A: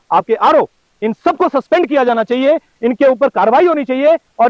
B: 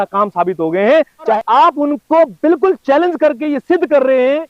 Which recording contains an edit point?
B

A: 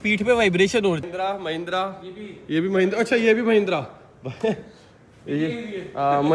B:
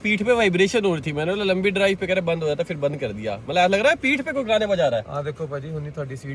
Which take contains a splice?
A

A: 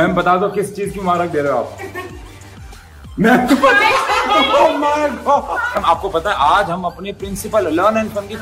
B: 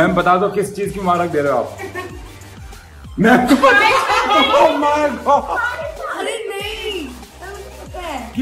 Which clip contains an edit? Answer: A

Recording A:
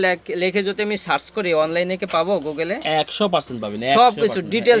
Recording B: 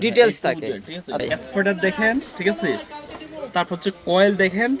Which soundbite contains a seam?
B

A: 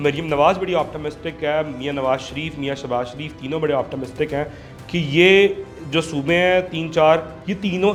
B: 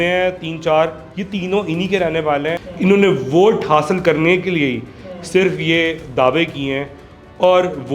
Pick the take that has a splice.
B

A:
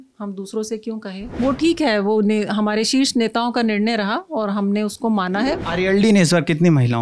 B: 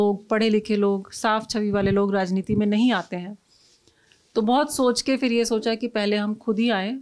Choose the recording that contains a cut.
A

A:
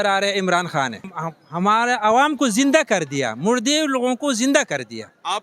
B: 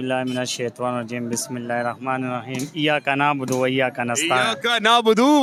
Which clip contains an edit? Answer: A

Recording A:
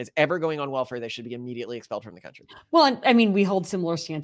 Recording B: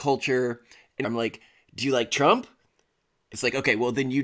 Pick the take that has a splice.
B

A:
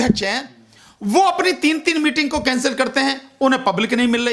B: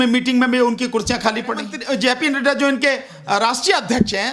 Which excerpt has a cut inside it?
B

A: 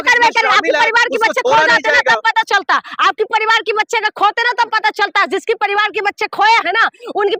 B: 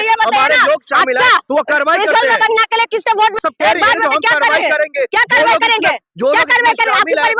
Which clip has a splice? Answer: B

